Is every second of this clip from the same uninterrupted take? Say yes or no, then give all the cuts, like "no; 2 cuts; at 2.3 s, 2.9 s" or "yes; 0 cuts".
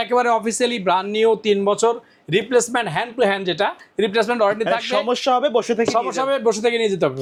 yes; 0 cuts